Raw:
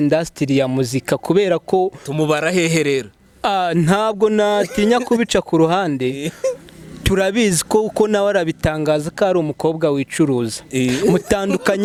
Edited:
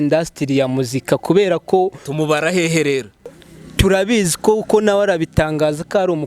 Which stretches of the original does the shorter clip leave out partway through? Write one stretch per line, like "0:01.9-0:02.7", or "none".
0:03.3-0:06.6